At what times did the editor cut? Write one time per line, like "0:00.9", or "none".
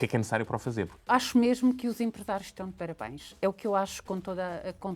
0:01.0